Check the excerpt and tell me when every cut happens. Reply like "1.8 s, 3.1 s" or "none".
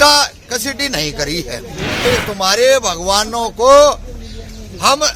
2.0 s